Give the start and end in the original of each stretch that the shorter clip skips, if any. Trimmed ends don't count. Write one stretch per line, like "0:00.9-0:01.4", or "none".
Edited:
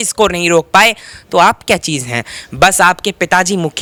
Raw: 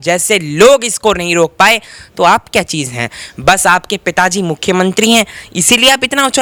none